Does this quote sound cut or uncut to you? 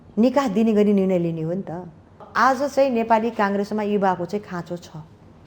cut